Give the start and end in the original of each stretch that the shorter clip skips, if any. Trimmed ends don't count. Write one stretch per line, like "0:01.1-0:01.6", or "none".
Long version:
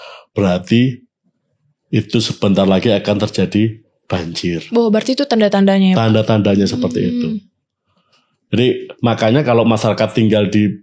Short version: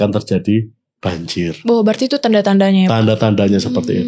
none